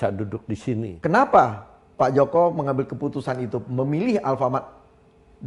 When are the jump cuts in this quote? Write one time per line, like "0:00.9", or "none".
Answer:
0:00.9

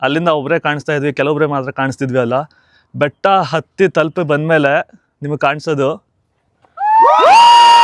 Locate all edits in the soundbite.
none

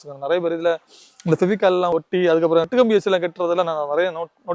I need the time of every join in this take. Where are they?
none

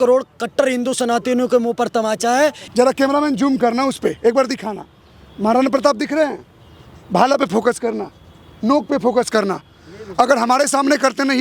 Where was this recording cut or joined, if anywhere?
0:02.6

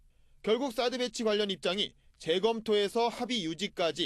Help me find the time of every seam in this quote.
0:02.7

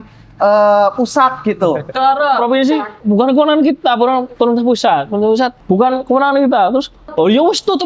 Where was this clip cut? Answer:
0:01.9
0:02.9
0:04.3
0:05.6
0:07.1

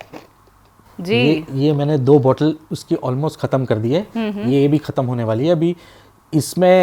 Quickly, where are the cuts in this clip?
none

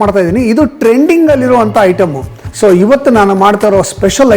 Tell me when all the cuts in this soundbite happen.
0:02.4

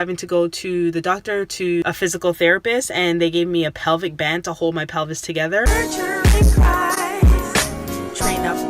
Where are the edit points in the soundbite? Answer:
0:01.8
0:05.7

